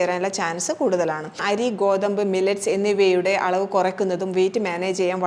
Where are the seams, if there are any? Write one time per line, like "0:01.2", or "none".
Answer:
0:01.4